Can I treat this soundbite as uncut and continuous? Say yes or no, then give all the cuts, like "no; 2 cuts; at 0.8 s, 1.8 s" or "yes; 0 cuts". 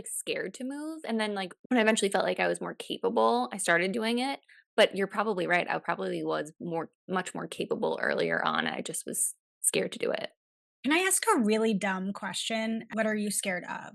no; 1 cut; at 12.9 s